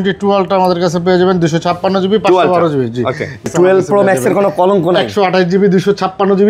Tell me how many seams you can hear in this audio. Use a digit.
1